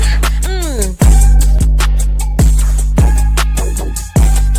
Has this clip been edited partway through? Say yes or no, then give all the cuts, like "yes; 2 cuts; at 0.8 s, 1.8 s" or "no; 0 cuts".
no; 0 cuts